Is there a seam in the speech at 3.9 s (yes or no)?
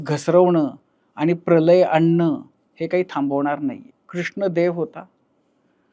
yes